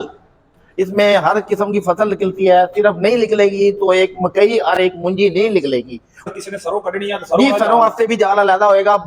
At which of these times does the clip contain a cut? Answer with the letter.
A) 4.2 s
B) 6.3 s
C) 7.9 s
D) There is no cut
B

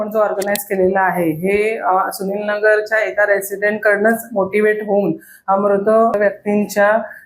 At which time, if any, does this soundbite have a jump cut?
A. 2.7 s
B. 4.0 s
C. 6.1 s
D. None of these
C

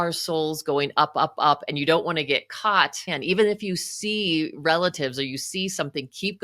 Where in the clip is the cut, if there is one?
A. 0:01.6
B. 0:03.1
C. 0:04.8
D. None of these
B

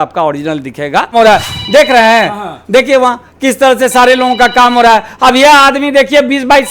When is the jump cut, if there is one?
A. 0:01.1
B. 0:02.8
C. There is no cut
A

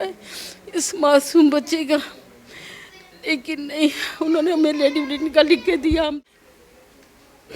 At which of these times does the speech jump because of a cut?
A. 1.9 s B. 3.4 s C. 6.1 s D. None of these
C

